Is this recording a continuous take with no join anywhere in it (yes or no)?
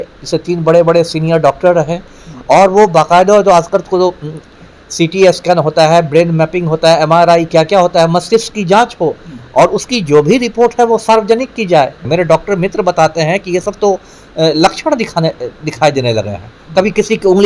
no